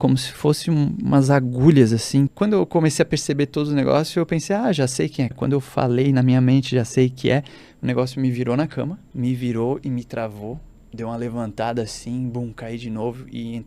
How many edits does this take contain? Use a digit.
3